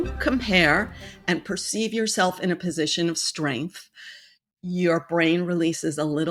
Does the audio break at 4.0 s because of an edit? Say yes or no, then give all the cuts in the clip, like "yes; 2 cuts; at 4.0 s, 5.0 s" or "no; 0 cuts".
no; 0 cuts